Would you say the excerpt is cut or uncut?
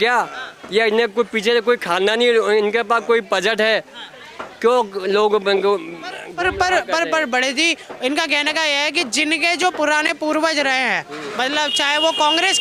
uncut